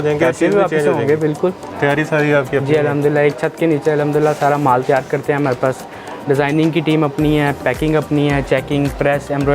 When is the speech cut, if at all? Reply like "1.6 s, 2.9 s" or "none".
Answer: 1.7 s